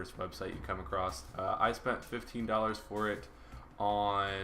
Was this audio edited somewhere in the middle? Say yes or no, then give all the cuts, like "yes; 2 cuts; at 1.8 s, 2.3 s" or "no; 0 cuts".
yes; 1 cut; at 2.0 s